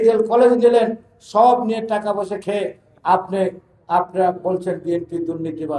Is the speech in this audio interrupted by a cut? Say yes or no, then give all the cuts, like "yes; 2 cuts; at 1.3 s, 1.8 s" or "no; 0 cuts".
no; 0 cuts